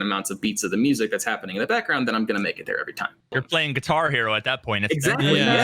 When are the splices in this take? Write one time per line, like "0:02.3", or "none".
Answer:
0:03.4